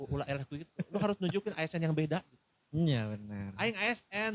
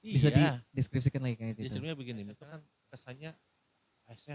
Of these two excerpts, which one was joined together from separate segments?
second; 1 cut; at 2.5 s

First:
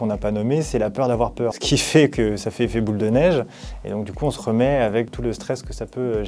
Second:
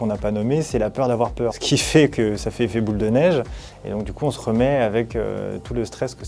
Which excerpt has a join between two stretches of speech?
first; 1 cut; at 5.1 s

